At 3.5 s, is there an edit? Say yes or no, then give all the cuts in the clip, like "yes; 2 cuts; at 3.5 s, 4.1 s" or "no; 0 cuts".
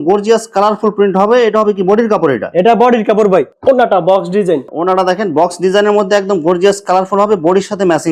no; 0 cuts